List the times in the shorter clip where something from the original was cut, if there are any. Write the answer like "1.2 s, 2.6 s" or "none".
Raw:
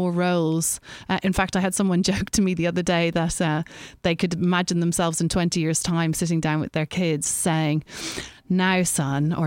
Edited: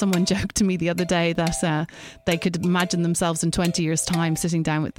none